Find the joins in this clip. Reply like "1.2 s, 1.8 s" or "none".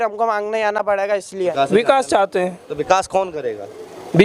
1.5 s